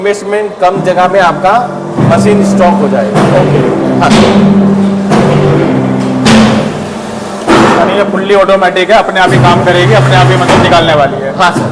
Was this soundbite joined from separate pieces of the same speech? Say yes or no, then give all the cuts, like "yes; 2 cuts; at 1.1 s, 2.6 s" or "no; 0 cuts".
no; 0 cuts